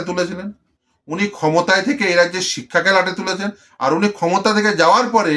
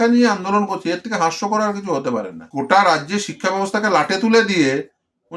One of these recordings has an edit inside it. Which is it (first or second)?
second